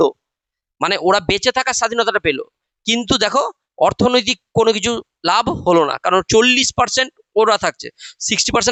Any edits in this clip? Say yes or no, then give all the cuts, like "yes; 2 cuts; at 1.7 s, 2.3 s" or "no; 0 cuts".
no; 0 cuts